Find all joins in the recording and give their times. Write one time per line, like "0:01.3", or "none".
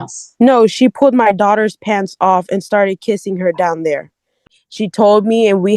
0:04.6